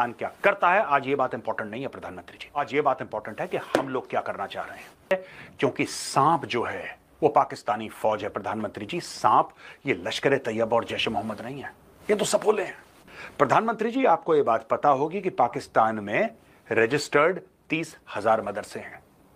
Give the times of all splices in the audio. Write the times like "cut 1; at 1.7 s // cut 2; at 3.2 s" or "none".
cut 1; at 5.1 s

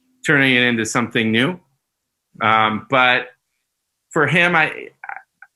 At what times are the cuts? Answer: none

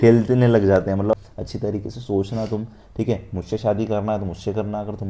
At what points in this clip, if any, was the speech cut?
cut 1; at 1.1 s

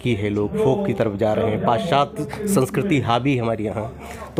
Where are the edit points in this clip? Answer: none

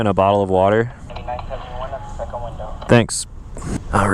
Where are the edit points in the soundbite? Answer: cut 1; at 1.0 s

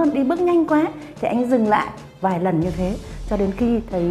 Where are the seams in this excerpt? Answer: cut 1; at 2.0 s

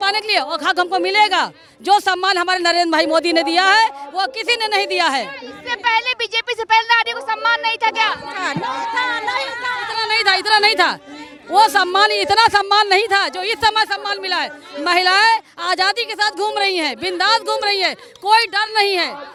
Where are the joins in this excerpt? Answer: none

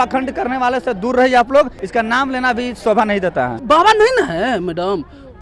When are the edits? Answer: cut 1; at 1.8 s // cut 2; at 3.6 s

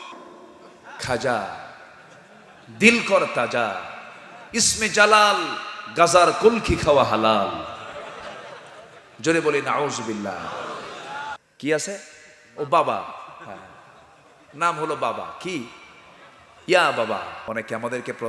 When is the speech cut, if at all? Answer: cut 1; at 11.3 s // cut 2; at 17.4 s

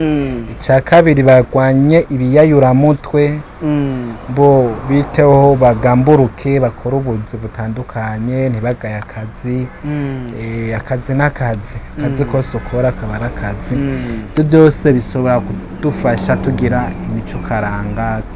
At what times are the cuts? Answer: none

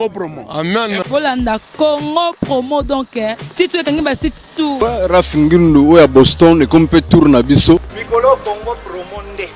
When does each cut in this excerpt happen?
cut 1; at 4.8 s // cut 2; at 8.0 s

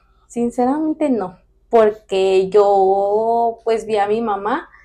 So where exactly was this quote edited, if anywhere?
none

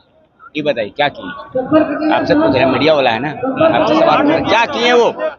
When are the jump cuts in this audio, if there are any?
none

